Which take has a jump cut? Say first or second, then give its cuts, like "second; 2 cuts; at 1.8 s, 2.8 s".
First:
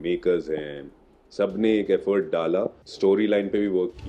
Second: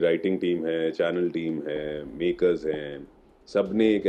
first; 1 cut; at 2.8 s